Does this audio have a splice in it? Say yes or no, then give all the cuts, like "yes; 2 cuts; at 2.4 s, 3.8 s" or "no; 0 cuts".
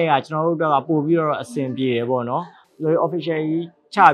yes; 1 cut; at 2.6 s